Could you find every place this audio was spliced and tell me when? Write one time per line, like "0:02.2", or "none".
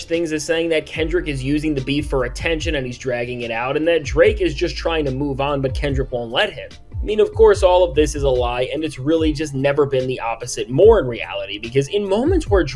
none